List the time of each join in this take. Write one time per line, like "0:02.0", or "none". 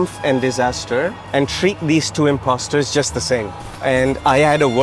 0:01.2
0:03.6